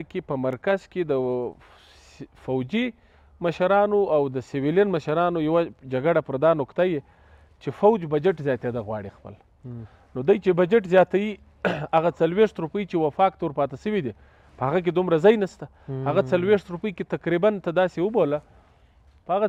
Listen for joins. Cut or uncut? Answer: uncut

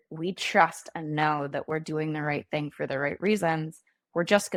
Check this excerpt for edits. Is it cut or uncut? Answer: uncut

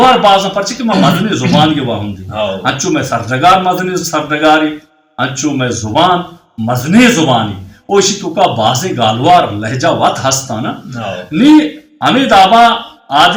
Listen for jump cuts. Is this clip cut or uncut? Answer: uncut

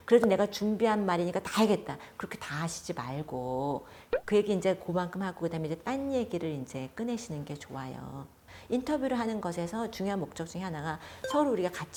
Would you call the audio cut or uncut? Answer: uncut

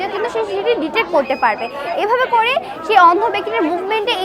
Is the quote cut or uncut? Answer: uncut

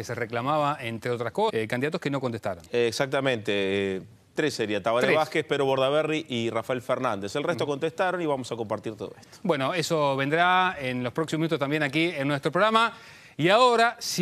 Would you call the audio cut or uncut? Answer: uncut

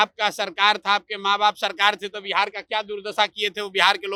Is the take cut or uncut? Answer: uncut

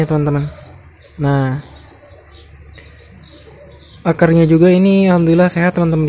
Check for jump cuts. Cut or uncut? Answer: uncut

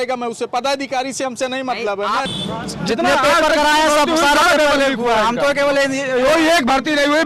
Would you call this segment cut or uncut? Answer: cut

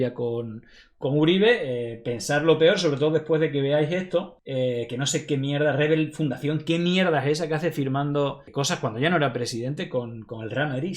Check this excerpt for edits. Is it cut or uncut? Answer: cut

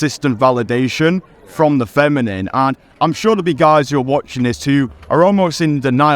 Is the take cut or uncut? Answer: uncut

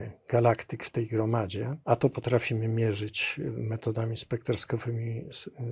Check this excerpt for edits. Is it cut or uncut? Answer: cut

